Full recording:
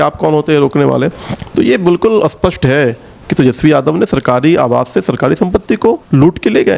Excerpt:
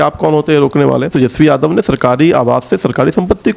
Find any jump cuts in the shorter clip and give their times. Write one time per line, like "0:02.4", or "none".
0:01.1